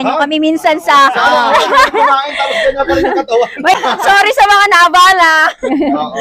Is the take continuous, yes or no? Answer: no